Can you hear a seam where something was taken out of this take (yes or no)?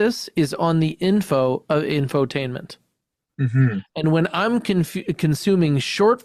no